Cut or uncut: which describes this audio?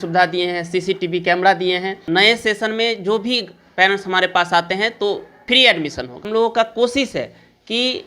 cut